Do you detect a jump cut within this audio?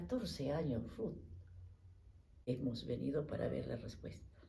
yes; 1 cut; at 1.8 s

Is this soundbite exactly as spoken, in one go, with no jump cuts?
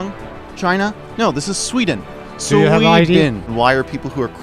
no; 1 cut; at 3.5 s

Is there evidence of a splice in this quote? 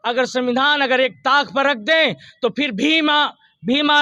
no; 0 cuts

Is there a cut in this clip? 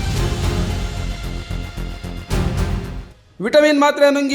yes; 1 cut; at 3.2 s

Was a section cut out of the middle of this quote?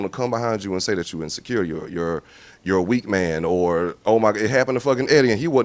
no; 0 cuts

